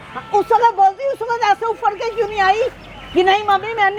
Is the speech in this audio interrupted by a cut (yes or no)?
no